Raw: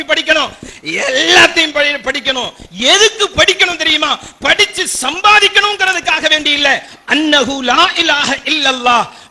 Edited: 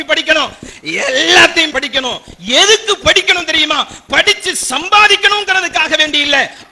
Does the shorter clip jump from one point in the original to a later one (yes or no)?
yes